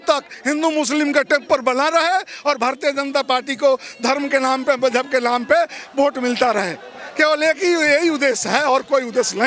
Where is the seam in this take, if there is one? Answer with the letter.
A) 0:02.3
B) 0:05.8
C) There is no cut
C